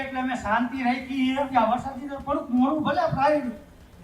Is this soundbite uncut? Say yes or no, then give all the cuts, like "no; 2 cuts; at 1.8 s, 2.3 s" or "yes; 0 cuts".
no; 1 cut; at 1.5 s